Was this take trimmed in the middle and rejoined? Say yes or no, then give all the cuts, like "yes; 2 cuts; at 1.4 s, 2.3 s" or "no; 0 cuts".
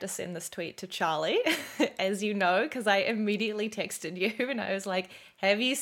no; 0 cuts